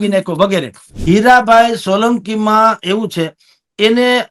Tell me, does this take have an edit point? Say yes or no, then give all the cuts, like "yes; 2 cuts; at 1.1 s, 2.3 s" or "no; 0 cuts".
yes; 1 cut; at 0.9 s